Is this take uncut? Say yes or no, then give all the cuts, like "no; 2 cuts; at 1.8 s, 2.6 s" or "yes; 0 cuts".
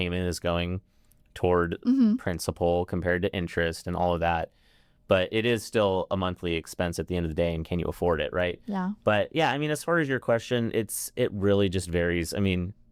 yes; 0 cuts